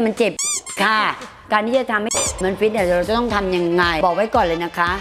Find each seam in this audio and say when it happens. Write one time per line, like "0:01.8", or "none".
0:01.3
0:03.9